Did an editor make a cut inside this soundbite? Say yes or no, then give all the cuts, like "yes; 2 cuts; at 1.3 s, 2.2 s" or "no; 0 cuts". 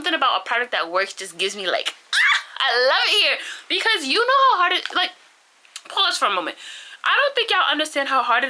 no; 0 cuts